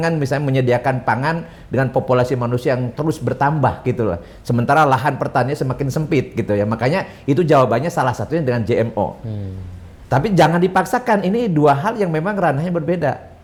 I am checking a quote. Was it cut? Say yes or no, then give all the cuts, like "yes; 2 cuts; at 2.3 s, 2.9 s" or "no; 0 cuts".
no; 0 cuts